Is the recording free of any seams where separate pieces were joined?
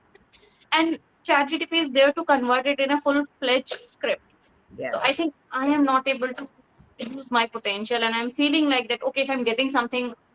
yes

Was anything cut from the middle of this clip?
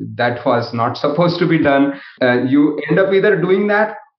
yes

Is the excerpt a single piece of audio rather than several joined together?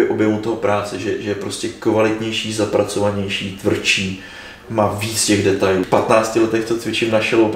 no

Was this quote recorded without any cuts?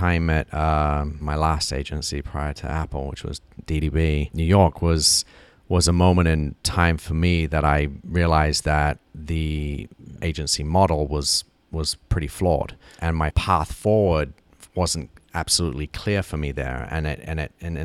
no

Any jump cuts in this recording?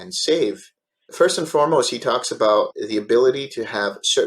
yes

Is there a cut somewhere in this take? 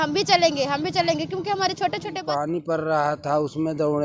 yes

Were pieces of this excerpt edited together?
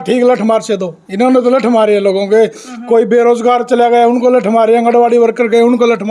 yes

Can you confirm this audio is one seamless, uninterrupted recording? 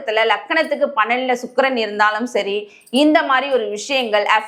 yes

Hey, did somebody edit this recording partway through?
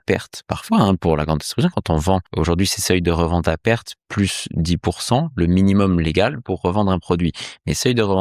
yes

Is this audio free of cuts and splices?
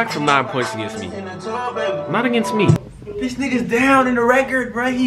no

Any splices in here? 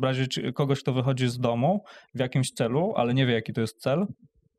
no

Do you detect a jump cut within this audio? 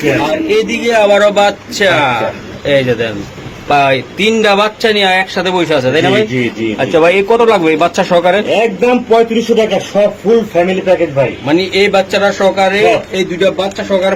no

